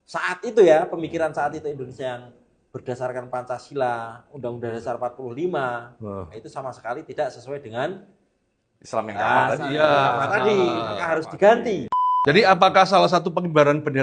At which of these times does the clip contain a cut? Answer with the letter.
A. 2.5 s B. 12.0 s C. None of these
B